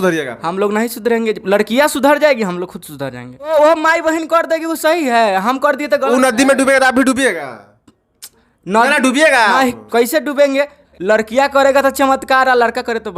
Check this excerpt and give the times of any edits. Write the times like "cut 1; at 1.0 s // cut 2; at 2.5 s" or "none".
cut 1; at 3.5 s // cut 2; at 10.8 s

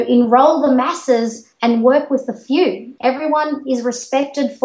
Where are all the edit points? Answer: cut 1; at 2.9 s

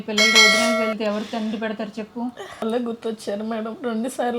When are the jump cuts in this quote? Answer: cut 1; at 2.6 s

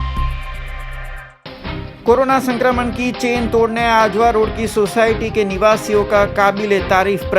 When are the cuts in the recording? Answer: cut 1; at 1.0 s

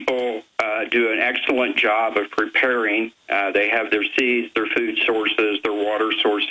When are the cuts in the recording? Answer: cut 1; at 3.7 s

